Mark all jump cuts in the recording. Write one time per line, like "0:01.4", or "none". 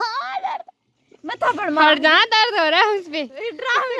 none